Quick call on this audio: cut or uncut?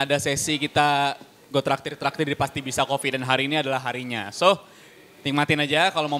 uncut